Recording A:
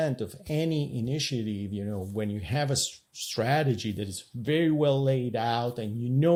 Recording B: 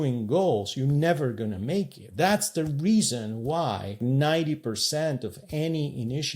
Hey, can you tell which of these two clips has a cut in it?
B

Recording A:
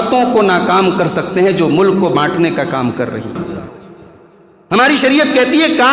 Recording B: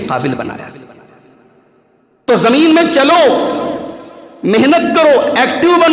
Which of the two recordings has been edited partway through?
A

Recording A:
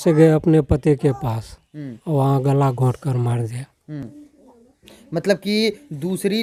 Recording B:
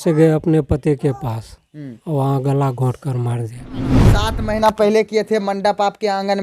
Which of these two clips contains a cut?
B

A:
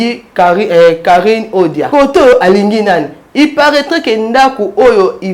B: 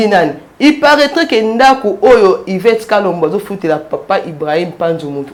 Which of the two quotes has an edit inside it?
A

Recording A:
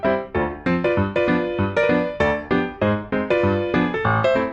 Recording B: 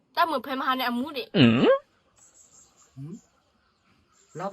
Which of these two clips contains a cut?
B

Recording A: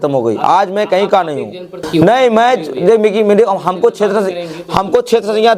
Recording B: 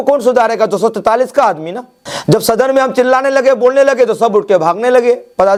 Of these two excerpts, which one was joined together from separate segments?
A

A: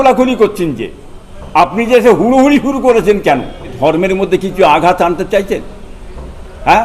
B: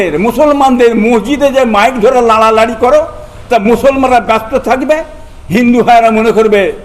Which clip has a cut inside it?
A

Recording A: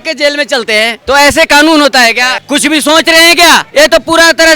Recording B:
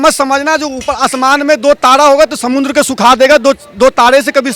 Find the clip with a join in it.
A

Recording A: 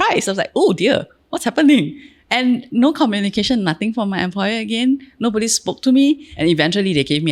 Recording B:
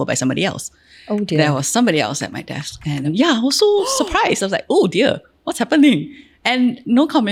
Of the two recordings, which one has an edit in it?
A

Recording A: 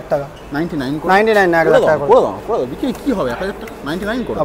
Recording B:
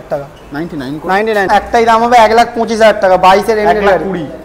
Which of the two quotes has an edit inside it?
B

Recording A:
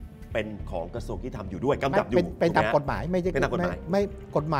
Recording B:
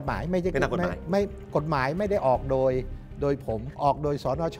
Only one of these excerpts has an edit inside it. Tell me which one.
B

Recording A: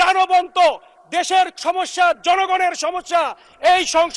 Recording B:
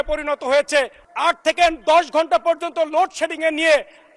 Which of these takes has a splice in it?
B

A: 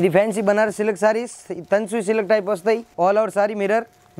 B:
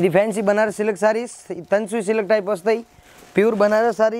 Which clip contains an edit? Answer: A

